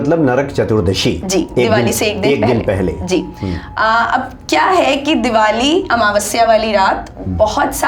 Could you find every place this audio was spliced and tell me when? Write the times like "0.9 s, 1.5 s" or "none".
none